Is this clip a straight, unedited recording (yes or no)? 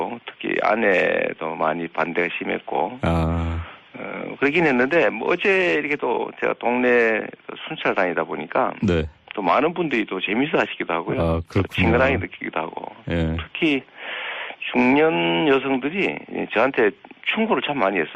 yes